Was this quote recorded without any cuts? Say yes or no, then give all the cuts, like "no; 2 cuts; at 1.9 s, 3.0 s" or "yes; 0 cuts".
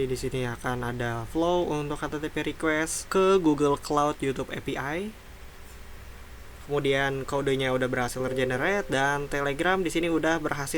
no; 1 cut; at 5.3 s